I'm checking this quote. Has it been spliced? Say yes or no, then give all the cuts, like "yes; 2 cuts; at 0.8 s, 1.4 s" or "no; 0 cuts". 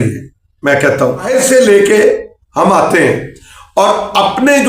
yes; 1 cut; at 1.3 s